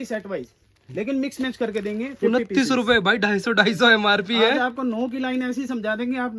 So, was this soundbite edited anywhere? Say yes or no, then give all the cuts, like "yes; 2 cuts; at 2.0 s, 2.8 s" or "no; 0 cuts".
no; 0 cuts